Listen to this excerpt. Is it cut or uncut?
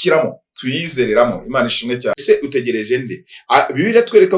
cut